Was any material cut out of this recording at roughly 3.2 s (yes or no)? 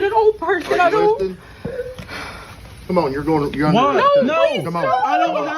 no